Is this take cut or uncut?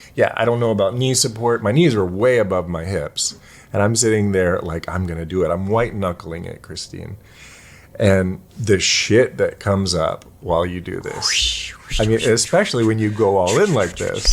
uncut